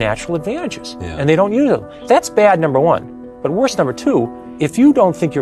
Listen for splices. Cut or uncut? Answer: cut